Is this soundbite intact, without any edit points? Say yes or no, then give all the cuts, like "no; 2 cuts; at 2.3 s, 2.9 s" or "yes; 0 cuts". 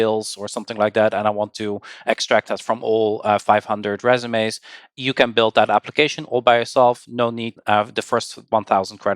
no; 1 cut; at 7.5 s